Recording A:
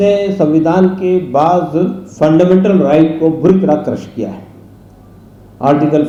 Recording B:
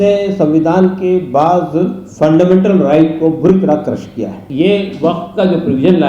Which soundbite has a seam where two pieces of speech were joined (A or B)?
B